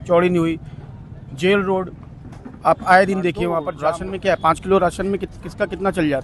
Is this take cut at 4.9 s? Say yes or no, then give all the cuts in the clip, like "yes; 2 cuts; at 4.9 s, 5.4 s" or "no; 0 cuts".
no; 1 cut; at 3.7 s